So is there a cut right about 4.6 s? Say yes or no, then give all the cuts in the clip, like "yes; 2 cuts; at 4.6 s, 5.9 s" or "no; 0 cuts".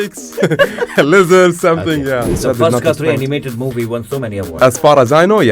yes; 2 cuts; at 2.4 s, 4.6 s